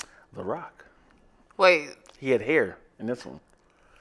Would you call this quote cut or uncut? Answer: uncut